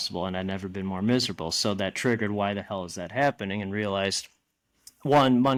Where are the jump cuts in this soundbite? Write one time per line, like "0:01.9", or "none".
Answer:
none

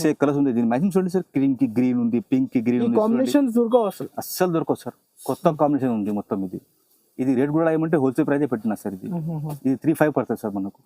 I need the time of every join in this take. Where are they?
none

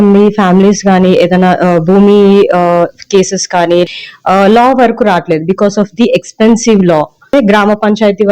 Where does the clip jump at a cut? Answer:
0:03.9
0:07.3

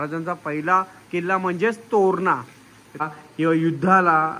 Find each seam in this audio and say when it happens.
0:03.0

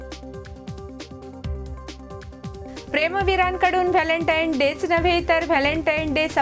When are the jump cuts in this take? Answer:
0:01.0

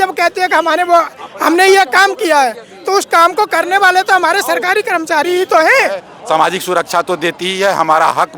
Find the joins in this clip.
0:06.1

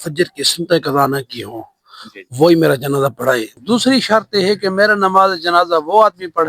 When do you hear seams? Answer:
0:03.5

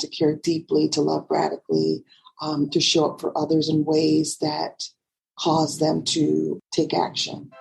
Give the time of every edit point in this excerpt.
0:06.6

